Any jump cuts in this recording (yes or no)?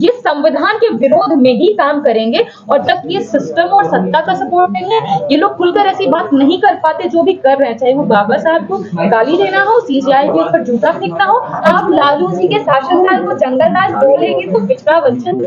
yes